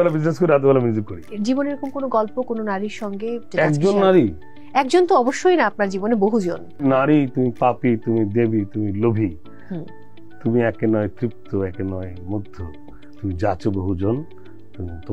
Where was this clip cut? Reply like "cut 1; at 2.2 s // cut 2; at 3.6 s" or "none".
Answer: cut 1; at 1.2 s // cut 2; at 3.5 s // cut 3; at 6.8 s